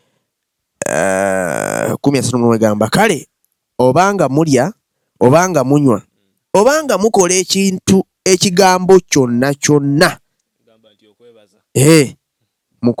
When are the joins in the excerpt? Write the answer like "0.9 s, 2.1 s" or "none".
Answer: none